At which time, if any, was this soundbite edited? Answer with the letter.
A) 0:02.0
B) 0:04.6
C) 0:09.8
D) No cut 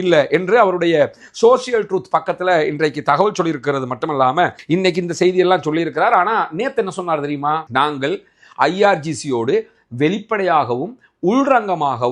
B